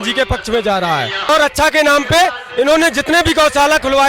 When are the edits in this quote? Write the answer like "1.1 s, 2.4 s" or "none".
1.3 s